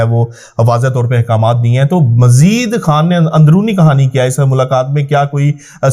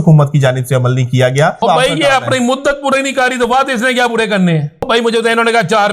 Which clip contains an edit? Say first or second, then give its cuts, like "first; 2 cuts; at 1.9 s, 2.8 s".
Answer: second; 2 cuts; at 1.6 s, 4.9 s